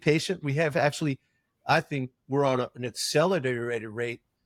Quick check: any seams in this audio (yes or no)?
no